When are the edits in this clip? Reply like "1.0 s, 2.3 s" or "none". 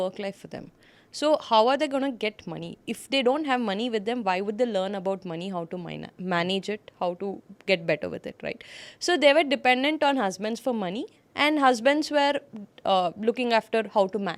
none